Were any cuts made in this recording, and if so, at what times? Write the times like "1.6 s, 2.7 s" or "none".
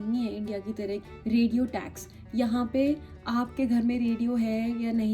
1.0 s